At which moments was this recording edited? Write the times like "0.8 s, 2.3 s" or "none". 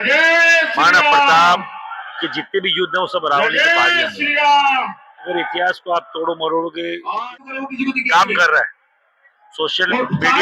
7.5 s